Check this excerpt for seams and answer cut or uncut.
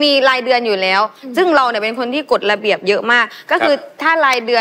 uncut